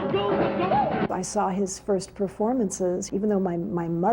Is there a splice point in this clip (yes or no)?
yes